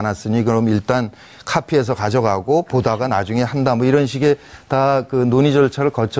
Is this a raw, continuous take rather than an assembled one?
yes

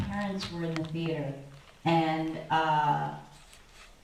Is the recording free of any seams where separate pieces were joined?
yes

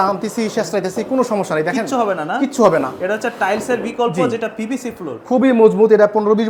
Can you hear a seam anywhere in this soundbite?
no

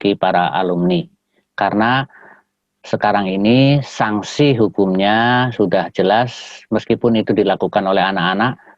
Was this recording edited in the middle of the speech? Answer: no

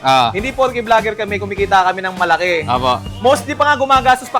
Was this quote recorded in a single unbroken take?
yes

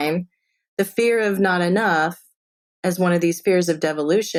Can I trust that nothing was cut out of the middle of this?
yes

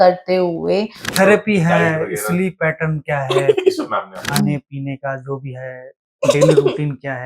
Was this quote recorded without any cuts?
no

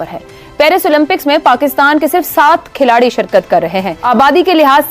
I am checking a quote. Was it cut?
yes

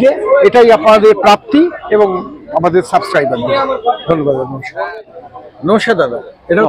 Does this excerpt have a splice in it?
no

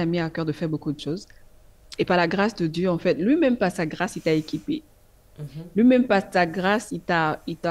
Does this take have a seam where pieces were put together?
no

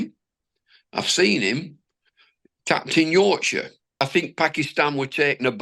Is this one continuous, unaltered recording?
no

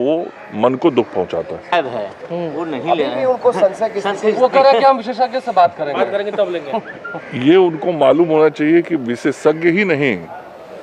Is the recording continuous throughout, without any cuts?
yes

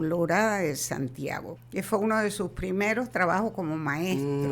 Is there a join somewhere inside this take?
yes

